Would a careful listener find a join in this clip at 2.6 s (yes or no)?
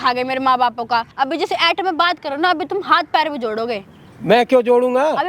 no